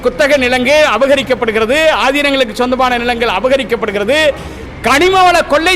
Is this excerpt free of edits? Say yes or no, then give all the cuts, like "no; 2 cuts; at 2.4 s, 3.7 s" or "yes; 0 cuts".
yes; 0 cuts